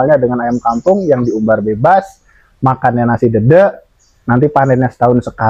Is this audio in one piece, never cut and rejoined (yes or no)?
yes